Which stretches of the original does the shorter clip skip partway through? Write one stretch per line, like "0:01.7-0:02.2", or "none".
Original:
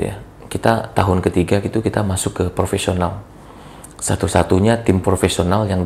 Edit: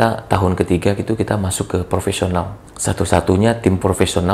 0:03.3-0:03.9